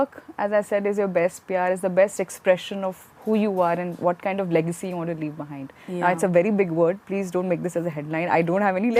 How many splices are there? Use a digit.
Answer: 0